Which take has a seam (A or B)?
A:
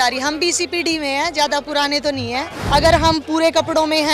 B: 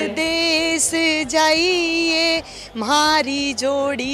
A